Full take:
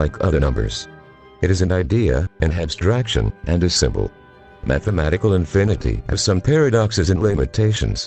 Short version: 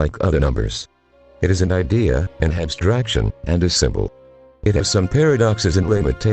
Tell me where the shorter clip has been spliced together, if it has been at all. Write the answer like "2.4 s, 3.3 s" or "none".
4.6 s